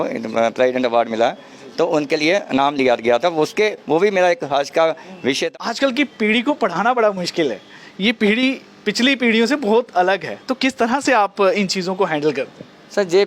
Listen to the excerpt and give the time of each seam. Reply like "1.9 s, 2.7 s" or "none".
5.4 s